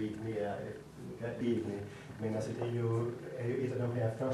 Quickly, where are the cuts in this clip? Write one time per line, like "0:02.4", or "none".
0:01.4